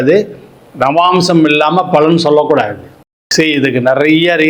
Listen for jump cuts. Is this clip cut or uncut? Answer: cut